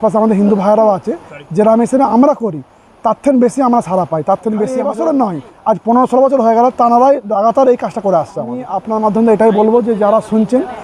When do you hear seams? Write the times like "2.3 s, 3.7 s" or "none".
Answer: 4.8 s, 8.8 s